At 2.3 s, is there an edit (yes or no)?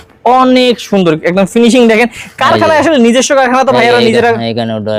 no